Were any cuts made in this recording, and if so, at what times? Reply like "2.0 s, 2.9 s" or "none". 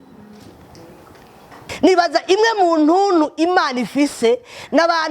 1.6 s